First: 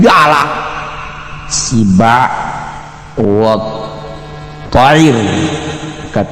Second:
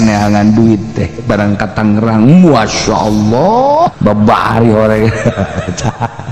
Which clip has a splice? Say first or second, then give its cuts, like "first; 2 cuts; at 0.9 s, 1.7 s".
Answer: second; 1 cut; at 3.9 s